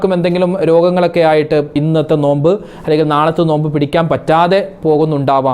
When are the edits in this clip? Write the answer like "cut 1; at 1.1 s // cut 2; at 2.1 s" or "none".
cut 1; at 1.8 s